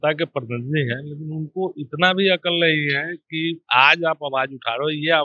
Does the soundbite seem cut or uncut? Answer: uncut